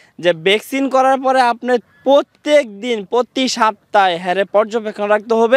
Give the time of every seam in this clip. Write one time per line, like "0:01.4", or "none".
none

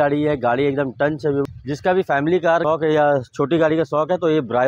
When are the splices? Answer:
0:01.4
0:02.6

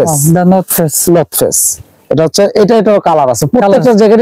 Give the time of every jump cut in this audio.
none

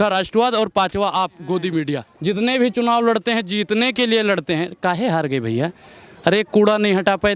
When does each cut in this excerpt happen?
0:02.1

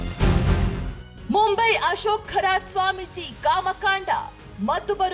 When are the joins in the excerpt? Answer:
0:01.2

